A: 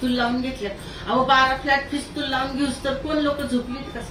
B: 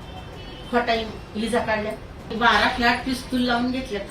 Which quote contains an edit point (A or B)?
B